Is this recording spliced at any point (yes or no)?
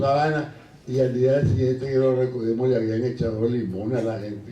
no